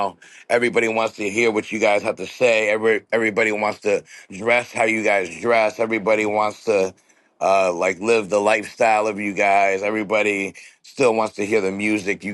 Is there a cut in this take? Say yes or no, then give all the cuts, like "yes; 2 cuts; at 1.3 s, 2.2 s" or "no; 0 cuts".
no; 0 cuts